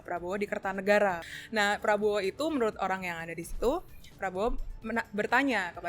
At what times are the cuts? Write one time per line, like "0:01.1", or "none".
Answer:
0:01.3